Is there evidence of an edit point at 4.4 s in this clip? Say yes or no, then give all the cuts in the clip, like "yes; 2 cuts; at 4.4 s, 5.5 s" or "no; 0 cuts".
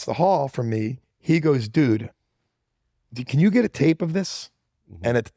no; 1 cut; at 1.0 s